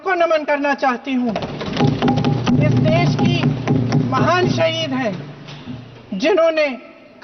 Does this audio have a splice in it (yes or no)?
no